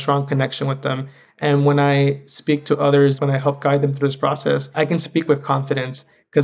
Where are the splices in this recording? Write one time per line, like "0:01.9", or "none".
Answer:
0:03.2
0:04.7